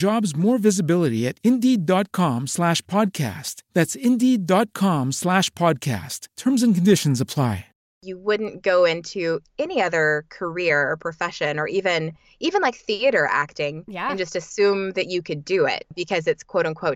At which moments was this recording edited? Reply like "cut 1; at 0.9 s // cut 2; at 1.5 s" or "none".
cut 1; at 8.0 s // cut 2; at 16.0 s